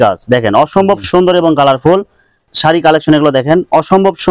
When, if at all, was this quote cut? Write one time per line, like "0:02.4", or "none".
0:02.4